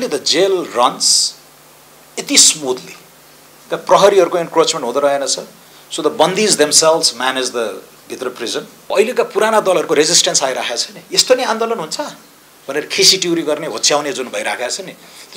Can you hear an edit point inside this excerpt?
yes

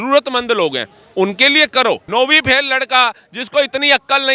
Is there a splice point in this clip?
yes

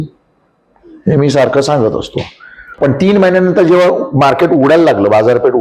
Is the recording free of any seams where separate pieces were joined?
no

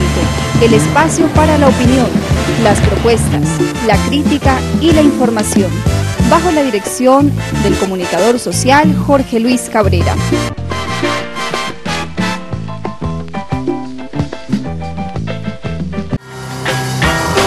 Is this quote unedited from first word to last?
yes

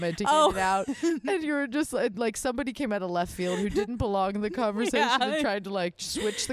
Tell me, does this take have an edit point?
no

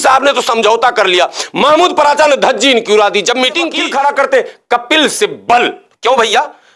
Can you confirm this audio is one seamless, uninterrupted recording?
no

